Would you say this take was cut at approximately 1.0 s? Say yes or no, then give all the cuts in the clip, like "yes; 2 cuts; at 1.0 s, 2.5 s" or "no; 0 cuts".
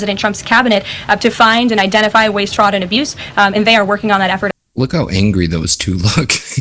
no; 1 cut; at 4.6 s